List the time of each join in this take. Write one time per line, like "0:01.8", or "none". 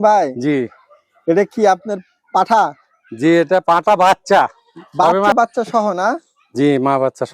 0:05.3